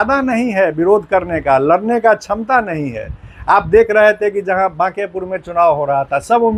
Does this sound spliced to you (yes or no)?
no